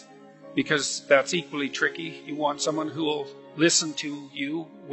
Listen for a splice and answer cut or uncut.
cut